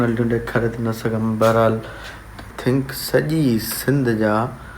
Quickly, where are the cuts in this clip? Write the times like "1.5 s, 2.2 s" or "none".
2.5 s